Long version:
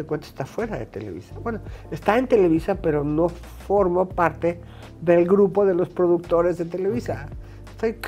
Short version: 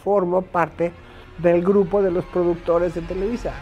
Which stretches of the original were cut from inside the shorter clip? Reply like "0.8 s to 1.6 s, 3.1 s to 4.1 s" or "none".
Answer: none